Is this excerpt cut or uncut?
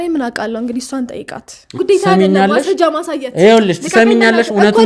cut